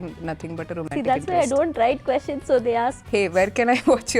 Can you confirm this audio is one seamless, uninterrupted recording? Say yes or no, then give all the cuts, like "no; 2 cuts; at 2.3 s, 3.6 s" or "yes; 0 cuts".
no; 1 cut; at 3.0 s